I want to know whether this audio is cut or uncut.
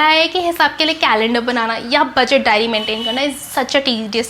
uncut